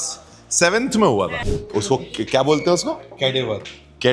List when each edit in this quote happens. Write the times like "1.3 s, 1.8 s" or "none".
1.4 s